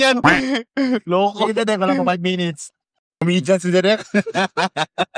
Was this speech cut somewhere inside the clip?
yes; 1 cut; at 3.2 s

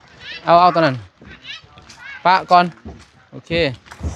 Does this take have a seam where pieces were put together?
no; 0 cuts

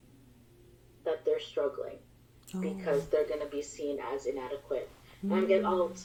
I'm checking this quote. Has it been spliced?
no; 0 cuts

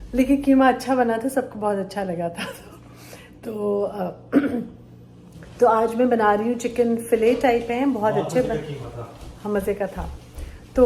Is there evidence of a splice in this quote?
no; 0 cuts

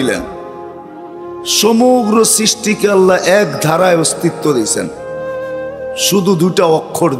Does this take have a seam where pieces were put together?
no; 0 cuts

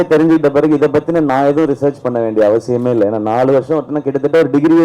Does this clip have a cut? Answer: no; 0 cuts

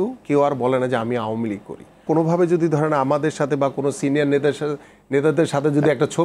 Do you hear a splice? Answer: yes; 1 cut; at 2.0 s

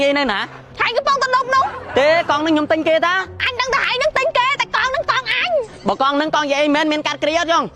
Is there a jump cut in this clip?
no; 0 cuts

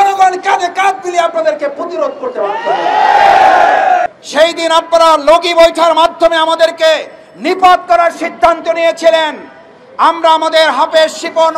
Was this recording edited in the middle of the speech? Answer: yes; 1 cut; at 4.2 s

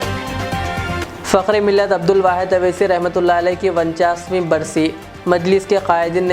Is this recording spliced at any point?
yes; 1 cut; at 1.0 s

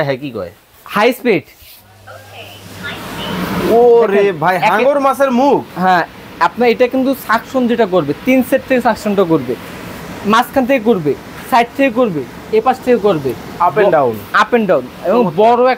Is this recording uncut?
yes; 0 cuts

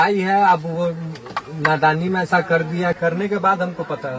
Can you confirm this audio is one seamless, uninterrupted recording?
no; 1 cut; at 3.0 s

